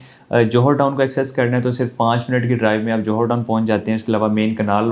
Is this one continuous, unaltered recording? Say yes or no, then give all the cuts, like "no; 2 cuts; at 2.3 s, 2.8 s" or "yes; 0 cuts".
yes; 0 cuts